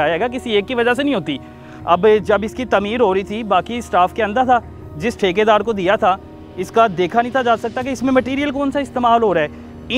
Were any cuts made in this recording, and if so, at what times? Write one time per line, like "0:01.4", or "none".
none